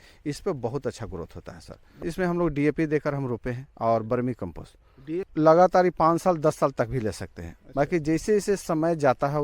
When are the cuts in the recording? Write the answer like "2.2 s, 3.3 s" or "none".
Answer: 2.0 s, 5.3 s